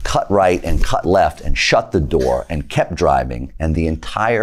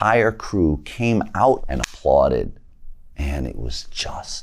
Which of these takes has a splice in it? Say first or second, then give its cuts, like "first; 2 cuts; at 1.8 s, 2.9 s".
second; 1 cut; at 1.6 s